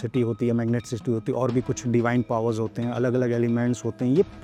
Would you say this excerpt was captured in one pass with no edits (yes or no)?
yes